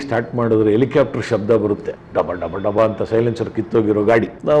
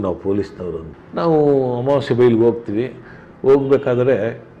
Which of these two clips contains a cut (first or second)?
second